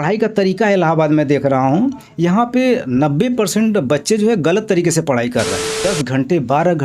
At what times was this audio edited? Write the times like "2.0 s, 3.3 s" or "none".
5.8 s